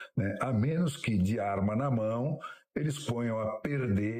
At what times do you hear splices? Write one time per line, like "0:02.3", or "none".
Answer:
none